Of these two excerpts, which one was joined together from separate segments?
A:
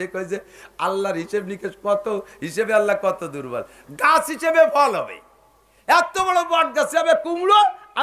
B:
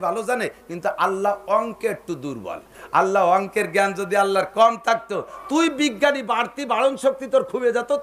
B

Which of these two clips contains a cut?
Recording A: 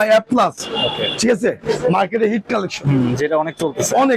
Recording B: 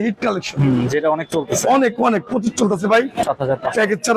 B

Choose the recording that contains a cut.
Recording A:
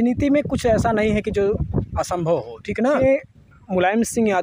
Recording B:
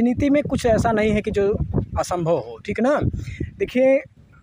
A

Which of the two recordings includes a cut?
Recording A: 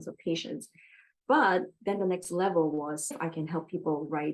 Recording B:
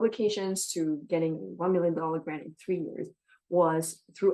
A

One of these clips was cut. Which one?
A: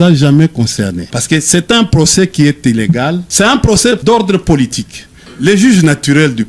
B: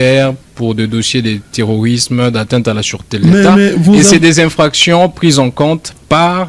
A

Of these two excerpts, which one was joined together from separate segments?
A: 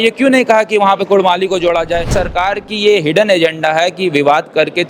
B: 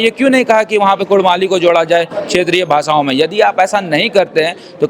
A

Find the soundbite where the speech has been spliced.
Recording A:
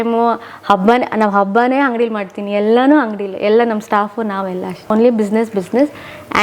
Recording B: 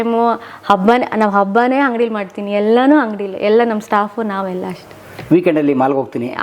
A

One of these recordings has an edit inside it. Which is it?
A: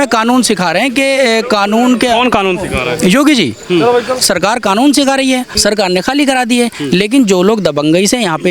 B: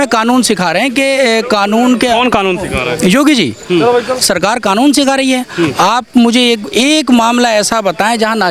A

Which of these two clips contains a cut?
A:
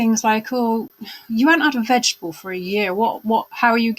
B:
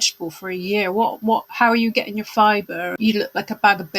B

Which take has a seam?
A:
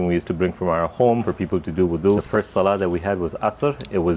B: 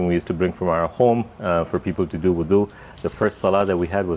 A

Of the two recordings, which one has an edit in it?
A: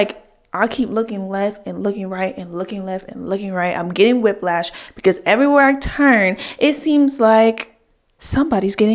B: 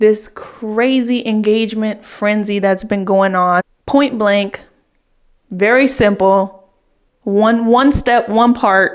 B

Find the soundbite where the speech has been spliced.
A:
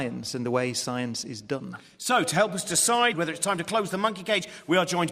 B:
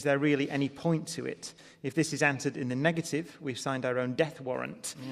B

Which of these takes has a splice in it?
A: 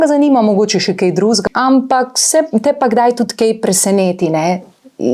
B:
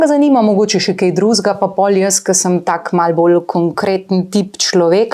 A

